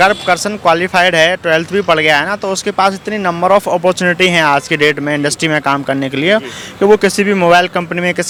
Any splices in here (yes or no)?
no